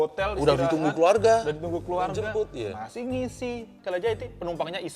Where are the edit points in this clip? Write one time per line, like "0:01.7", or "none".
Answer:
0:03.7